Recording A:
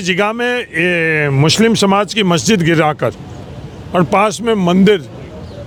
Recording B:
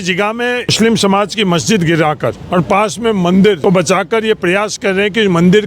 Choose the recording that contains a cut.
B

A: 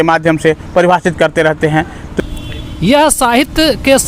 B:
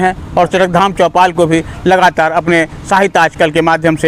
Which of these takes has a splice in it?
A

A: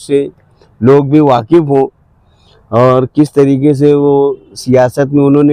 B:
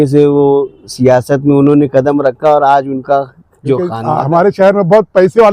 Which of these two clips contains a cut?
B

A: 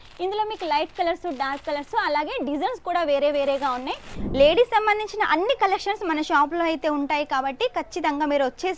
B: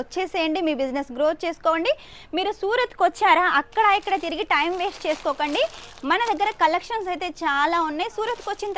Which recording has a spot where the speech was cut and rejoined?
A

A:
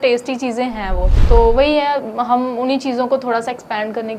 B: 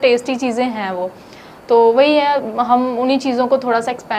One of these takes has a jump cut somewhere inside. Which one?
A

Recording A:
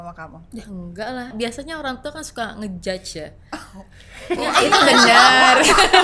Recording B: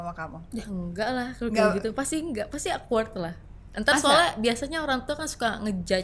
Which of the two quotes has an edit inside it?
A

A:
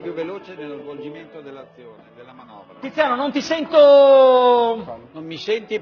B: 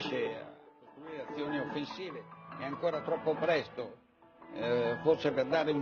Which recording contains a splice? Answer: A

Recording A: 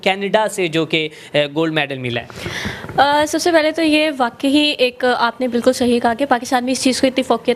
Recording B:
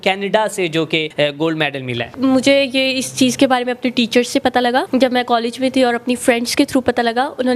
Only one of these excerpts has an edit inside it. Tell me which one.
B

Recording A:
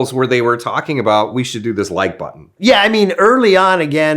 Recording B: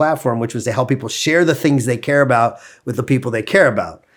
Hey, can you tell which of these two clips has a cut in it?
A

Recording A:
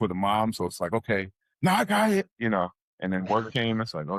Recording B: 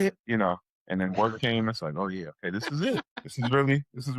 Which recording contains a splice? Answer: B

